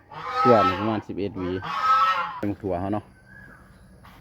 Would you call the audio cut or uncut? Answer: cut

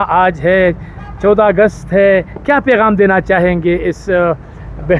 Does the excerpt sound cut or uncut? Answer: uncut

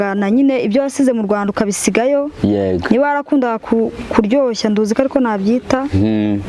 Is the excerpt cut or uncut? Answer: uncut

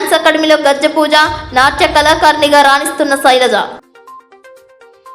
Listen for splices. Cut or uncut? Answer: uncut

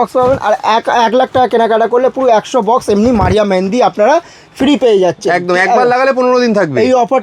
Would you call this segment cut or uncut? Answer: uncut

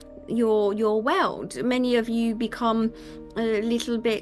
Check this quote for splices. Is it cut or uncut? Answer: uncut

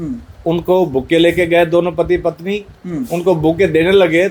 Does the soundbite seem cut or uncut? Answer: uncut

